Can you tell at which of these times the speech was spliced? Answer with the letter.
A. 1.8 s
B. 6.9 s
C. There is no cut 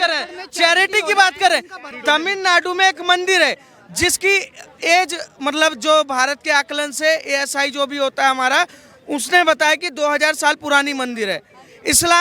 A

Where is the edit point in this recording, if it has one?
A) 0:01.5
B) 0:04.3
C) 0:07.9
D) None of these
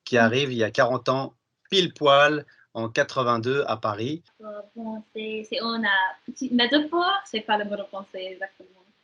B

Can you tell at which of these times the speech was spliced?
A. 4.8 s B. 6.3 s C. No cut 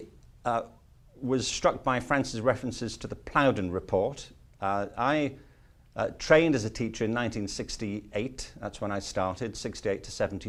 C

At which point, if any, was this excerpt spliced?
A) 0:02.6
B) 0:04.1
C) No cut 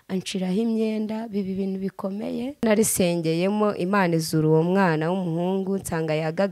A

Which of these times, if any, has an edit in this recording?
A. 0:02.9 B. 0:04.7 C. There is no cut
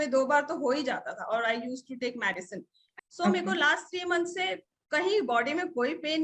A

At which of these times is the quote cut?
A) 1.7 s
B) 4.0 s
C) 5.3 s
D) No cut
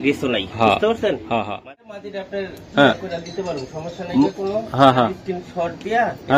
A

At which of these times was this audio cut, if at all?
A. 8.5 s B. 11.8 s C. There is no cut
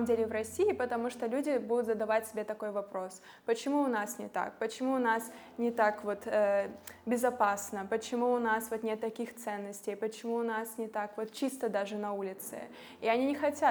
C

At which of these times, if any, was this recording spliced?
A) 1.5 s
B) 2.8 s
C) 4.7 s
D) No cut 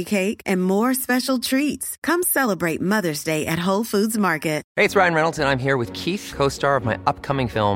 C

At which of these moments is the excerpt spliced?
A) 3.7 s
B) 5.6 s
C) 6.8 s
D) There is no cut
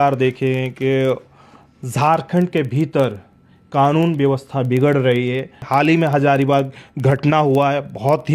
B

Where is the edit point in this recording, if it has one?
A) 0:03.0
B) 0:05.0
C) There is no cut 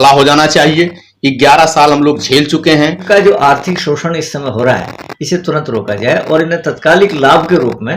A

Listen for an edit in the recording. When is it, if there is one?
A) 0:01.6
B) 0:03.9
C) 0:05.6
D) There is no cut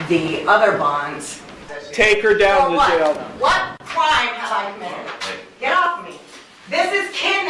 A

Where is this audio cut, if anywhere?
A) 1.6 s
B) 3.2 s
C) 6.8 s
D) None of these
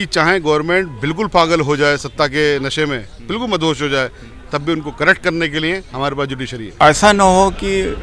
C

